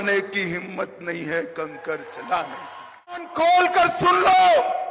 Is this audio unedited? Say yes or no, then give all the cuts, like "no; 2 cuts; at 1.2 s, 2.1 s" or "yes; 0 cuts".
no; 1 cut; at 3.3 s